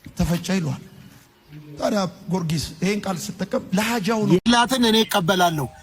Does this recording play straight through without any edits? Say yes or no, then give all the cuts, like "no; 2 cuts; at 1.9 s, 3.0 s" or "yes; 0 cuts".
no; 1 cut; at 4.4 s